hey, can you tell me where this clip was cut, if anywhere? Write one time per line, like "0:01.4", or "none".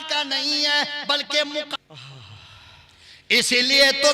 0:01.7